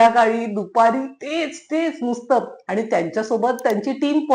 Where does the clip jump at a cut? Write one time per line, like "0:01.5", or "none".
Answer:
none